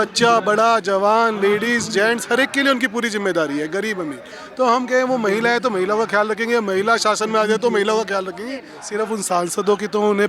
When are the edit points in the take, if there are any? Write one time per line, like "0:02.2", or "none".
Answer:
0:08.8